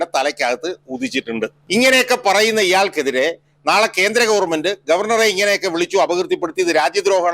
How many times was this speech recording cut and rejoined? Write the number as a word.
one